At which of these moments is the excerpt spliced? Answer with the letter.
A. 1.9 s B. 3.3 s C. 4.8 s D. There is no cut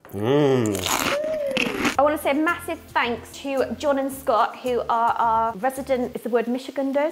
A